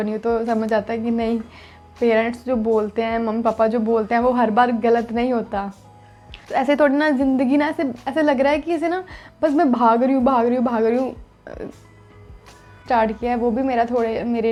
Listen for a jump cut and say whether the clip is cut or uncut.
uncut